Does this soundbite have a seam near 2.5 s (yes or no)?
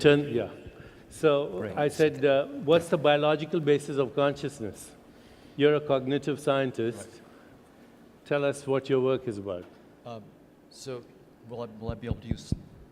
yes